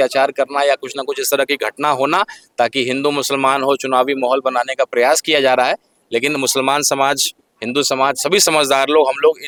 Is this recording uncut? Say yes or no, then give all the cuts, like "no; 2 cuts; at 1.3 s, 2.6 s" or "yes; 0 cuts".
yes; 0 cuts